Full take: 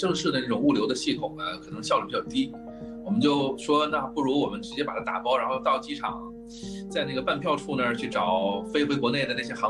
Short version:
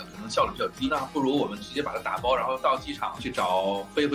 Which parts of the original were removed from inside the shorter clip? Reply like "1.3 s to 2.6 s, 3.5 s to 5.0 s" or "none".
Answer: 2.5 s to 3.9 s, 6.3 s to 8.0 s